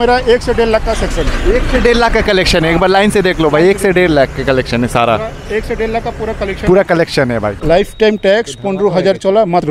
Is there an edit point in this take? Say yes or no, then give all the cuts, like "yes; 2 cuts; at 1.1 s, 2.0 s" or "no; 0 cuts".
yes; 1 cut; at 7.6 s